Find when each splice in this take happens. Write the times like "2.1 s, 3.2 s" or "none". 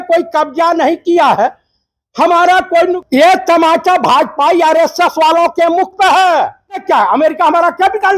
3.0 s, 6.8 s